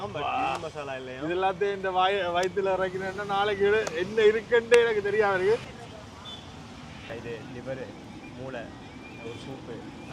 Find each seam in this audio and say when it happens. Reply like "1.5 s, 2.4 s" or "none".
5.7 s